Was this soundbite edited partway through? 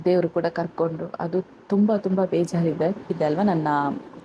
yes; 1 cut; at 3.2 s

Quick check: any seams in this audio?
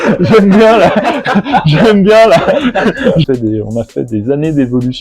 yes; 1 cut; at 3.3 s

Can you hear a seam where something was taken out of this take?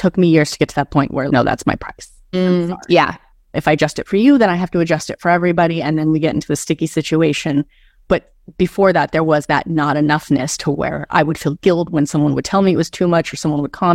no; 0 cuts

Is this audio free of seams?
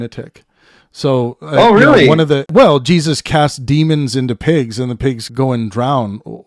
no; 2 cuts; at 2.5 s, 5.2 s

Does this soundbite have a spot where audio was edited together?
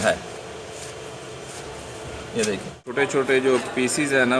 yes; 1 cut; at 2.8 s

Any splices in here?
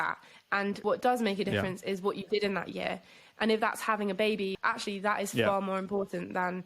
yes; 2 cuts; at 0.8 s, 4.5 s

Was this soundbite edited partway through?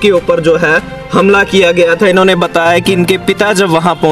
no; 0 cuts

